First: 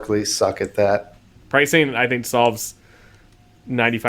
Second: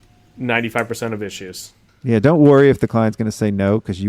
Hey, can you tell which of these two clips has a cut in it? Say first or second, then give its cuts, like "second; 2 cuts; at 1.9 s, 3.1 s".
first; 1 cut; at 1.2 s